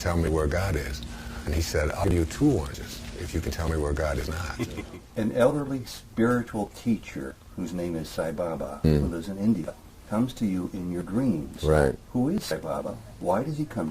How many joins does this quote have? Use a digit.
1